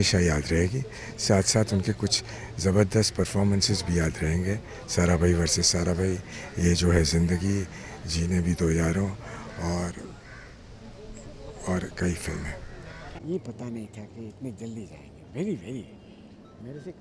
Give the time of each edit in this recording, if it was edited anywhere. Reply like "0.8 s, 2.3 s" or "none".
13.0 s